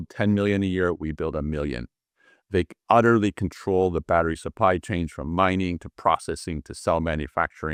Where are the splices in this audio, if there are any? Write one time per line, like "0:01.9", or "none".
none